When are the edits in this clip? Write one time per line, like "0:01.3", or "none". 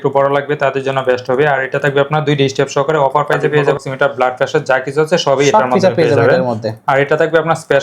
0:03.8

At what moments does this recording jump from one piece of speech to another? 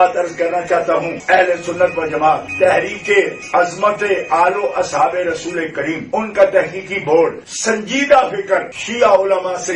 none

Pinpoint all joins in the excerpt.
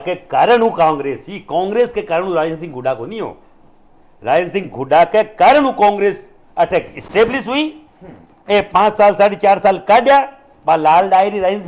none

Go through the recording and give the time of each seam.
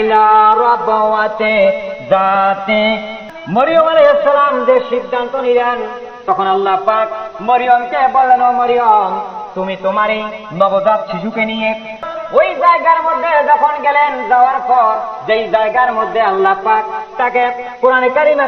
0:03.2
0:12.0

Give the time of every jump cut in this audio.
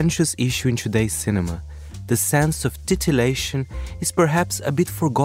0:02.0

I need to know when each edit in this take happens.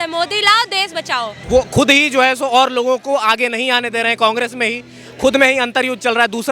0:01.3

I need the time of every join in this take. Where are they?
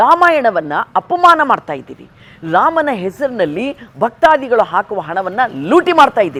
none

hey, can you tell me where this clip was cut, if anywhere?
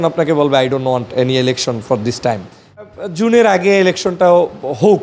0:02.8

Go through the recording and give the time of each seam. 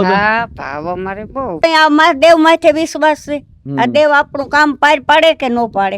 0:01.6

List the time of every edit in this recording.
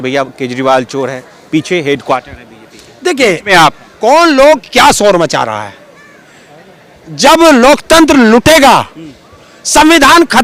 none

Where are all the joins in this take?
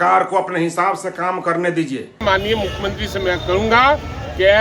0:02.2

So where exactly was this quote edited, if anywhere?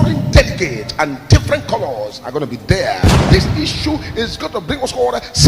0:03.2

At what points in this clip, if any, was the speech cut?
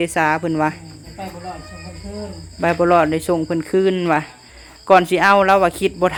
none

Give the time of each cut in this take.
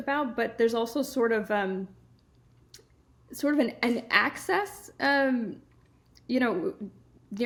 none

